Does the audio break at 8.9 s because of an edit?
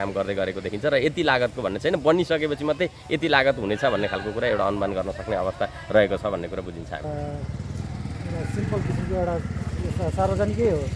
no; 1 cut; at 7.1 s

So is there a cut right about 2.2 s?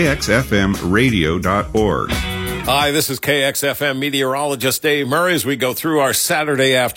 yes; 1 cut; at 2.2 s

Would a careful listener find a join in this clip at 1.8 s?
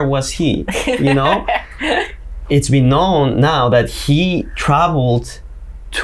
no; 0 cuts

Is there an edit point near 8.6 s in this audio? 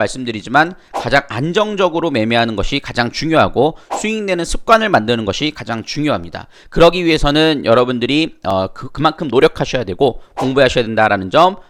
no; 0 cuts

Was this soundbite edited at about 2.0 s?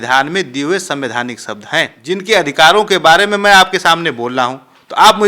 yes; 1 cut; at 2.0 s

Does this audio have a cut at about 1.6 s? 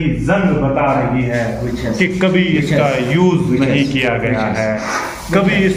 no; 0 cuts

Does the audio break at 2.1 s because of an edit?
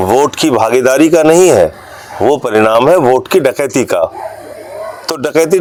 no; 0 cuts

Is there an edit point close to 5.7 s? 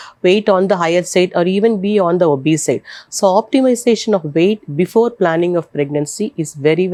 no; 0 cuts

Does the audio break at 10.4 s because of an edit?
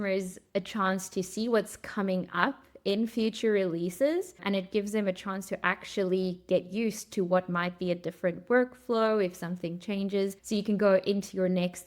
yes; 2 cuts; at 4.3 s, 10.4 s

